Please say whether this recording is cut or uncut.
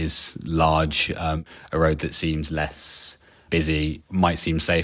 uncut